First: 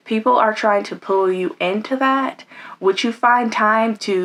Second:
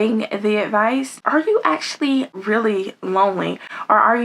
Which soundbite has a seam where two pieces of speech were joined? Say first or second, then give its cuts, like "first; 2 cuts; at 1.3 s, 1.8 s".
second; 2 cuts; at 1.2 s, 2.4 s